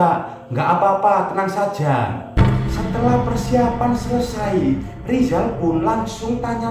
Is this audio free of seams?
no; 1 cut; at 2.2 s

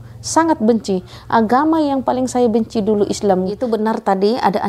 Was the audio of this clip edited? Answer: yes; 1 cut; at 3.7 s

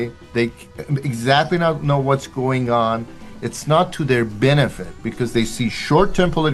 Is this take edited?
no; 0 cuts

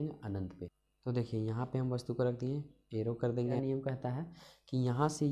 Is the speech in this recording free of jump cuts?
no; 1 cut; at 3.6 s

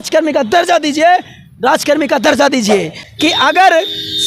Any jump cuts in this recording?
yes; 1 cut; at 3.0 s

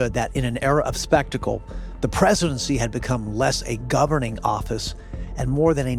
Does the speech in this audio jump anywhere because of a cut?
no; 0 cuts

